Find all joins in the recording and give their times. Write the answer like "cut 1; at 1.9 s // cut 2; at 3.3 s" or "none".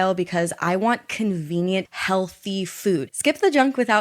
cut 1; at 1.9 s // cut 2; at 3.1 s

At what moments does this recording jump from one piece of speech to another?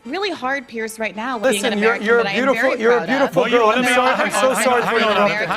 cut 1; at 1.4 s

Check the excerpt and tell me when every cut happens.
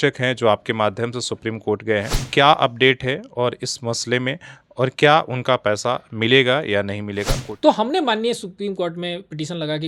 cut 1; at 2.2 s // cut 2; at 7.4 s

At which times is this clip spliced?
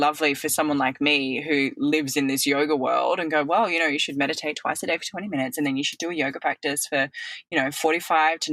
none

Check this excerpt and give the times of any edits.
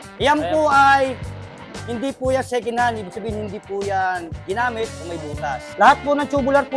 cut 1; at 5.6 s

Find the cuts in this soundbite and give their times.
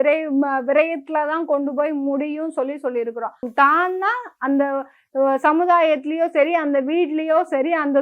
cut 1; at 3.5 s

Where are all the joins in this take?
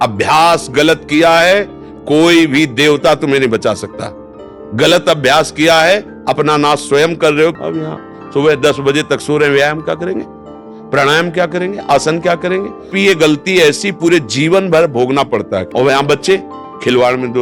cut 1; at 7.6 s // cut 2; at 12.9 s // cut 3; at 15.6 s

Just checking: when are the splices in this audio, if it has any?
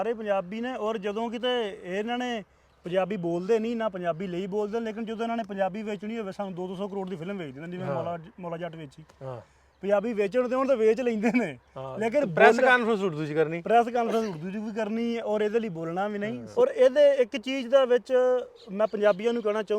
cut 1; at 16.4 s

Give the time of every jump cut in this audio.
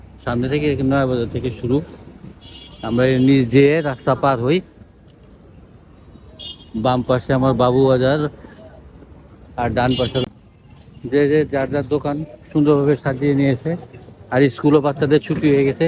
cut 1; at 10.2 s

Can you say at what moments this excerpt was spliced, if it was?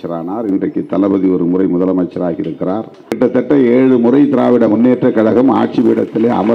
cut 1; at 3.1 s

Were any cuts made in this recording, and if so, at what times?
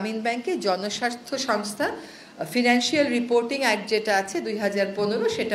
none

